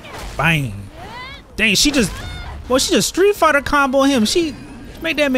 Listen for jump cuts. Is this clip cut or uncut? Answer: uncut